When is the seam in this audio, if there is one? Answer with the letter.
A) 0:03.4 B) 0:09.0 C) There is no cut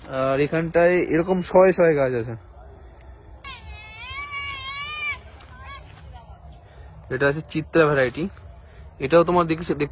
A